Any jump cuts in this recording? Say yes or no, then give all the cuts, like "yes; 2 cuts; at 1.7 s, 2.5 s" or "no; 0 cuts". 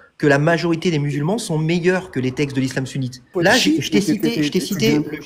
yes; 1 cut; at 3.3 s